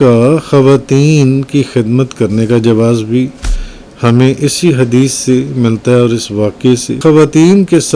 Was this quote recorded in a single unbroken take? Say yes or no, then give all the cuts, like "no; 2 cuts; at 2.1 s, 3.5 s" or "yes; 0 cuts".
no; 1 cut; at 7.0 s